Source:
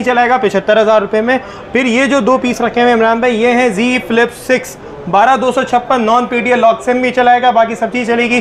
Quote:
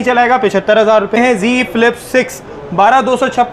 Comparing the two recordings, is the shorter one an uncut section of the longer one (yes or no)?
no